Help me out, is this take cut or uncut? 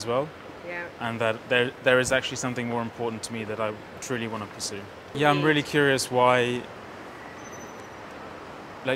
cut